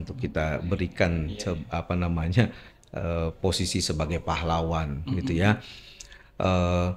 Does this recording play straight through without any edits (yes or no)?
yes